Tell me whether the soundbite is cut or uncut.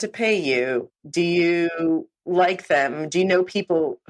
uncut